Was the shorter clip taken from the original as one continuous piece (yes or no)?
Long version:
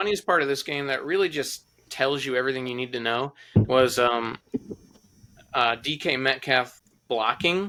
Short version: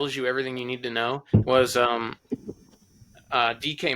no